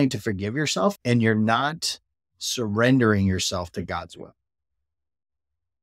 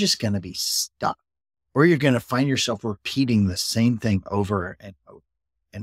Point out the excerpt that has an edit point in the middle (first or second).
first